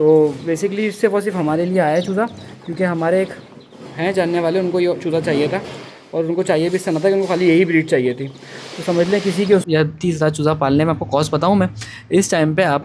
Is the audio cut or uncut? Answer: cut